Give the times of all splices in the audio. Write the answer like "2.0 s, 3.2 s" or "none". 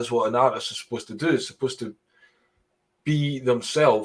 none